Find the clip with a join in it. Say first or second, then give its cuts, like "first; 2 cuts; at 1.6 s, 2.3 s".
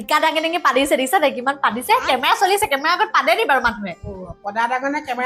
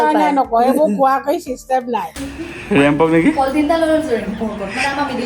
second; 1 cut; at 2.2 s